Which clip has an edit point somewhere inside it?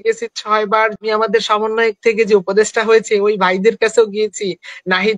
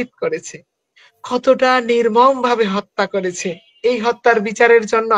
first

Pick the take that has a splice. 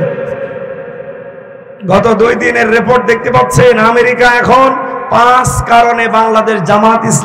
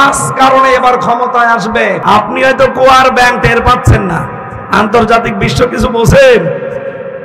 second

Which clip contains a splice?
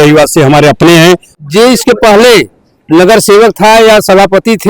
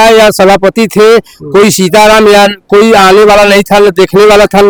first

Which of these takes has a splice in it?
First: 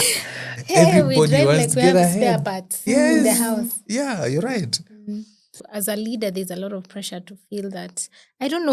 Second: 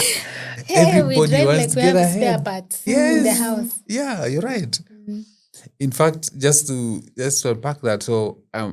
first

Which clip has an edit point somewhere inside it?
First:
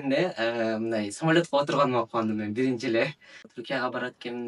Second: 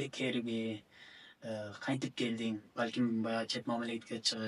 first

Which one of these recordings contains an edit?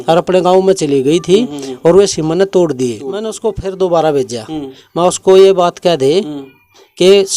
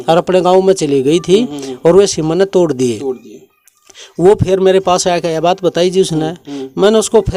first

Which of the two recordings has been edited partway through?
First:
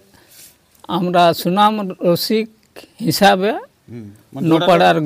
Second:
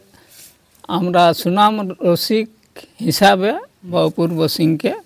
second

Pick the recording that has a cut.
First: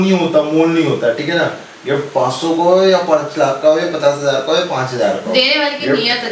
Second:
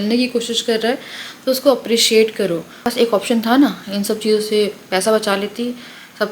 second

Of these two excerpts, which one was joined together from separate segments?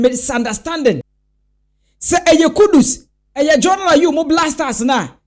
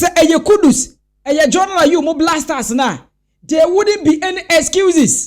first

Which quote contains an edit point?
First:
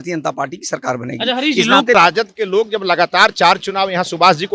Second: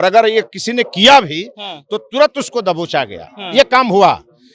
first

